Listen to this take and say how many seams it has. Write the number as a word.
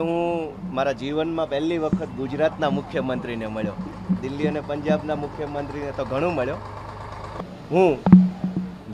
one